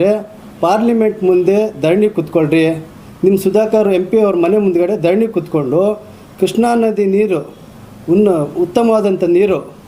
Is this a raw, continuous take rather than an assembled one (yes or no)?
yes